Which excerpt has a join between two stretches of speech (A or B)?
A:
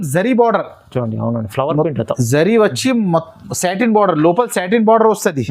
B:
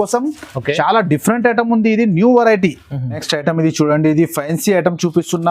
B